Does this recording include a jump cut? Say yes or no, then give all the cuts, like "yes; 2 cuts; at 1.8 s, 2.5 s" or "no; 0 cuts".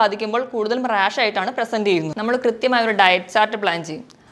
yes; 1 cut; at 2.1 s